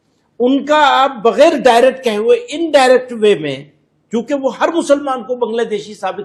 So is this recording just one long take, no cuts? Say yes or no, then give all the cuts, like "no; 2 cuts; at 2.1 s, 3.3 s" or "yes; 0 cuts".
yes; 0 cuts